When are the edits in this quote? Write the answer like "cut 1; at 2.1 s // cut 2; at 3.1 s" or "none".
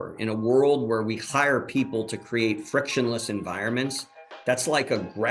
none

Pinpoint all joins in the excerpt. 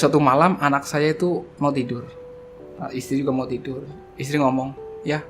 cut 1; at 1.5 s

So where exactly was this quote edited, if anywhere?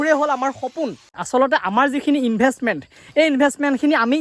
cut 1; at 1.2 s

